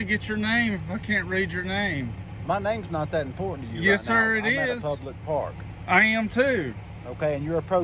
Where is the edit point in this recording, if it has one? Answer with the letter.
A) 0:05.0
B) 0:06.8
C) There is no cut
C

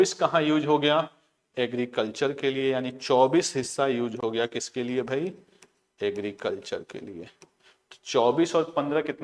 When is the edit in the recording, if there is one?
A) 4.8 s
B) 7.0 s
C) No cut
C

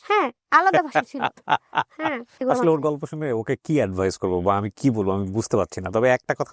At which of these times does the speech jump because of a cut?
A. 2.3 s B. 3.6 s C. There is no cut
A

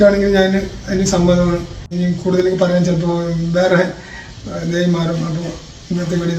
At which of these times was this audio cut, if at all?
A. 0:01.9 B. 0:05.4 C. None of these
A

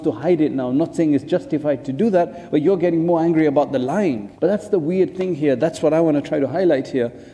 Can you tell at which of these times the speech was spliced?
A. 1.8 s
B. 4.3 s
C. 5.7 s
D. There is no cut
B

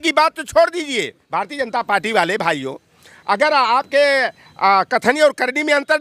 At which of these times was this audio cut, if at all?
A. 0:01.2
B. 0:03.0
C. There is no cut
A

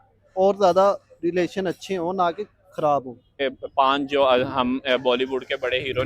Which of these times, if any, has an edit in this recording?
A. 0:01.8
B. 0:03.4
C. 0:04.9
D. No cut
B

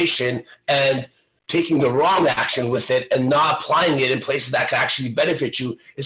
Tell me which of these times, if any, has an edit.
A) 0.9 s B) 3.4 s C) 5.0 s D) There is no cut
D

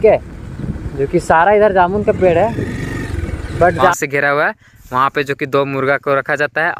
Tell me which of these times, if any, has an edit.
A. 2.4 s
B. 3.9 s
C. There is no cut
B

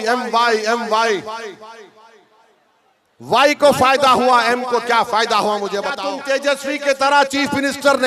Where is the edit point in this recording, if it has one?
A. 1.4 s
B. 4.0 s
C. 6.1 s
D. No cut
C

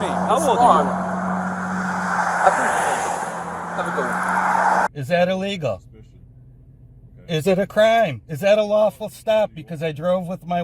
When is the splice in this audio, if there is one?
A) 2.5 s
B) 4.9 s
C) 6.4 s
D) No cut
B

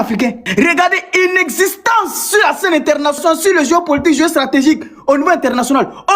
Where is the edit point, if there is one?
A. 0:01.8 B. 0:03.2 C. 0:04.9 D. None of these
B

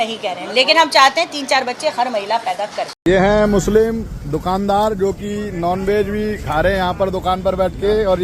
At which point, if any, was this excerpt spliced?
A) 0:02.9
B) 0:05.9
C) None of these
A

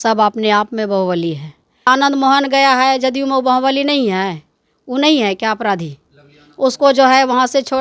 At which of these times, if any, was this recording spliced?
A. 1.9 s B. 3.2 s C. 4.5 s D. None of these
A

